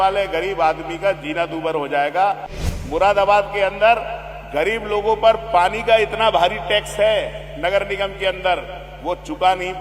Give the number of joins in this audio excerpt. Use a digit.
1